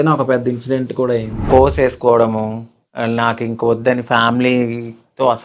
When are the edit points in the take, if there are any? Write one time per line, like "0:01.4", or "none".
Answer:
0:01.4

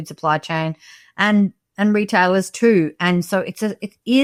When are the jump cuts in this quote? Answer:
none

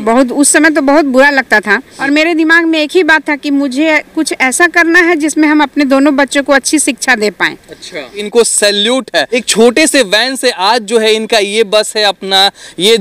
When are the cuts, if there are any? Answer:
0:01.9
0:08.2
0:09.4

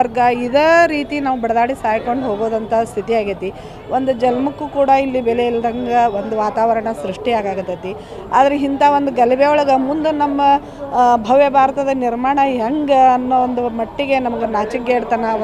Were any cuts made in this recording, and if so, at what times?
none

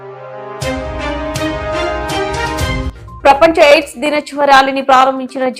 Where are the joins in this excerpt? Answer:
0:02.9

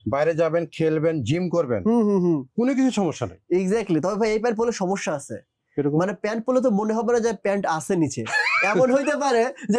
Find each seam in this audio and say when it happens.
none

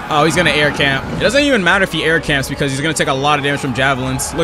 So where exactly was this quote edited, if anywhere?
0:01.1

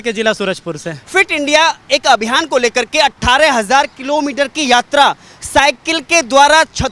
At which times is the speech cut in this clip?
0:01.0

